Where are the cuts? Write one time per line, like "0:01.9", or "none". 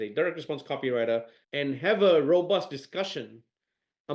0:01.4